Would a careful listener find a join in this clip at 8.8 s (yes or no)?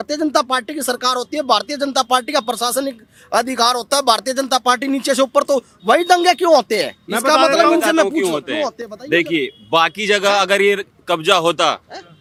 no